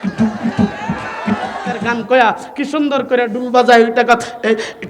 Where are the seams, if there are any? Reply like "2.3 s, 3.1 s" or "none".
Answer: 1.8 s